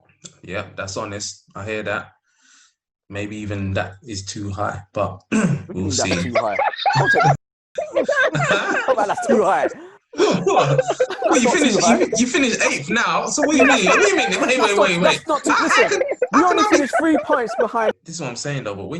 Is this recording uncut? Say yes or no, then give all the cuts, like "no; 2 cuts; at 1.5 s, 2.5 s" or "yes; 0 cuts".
no; 1 cut; at 18.0 s